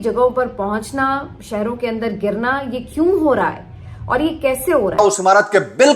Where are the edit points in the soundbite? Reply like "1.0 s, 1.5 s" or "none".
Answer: 5.0 s